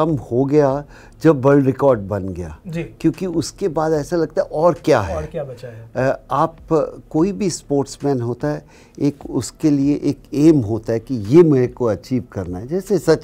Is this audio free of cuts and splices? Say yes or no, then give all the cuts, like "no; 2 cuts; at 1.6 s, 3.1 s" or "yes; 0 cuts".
yes; 0 cuts